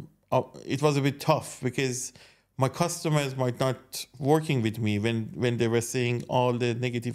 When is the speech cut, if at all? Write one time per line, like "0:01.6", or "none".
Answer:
none